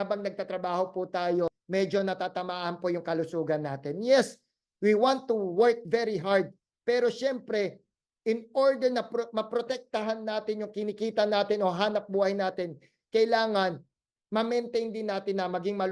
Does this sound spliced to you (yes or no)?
yes